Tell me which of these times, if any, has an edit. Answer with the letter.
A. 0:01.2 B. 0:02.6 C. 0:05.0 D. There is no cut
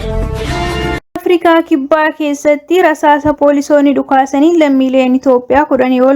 A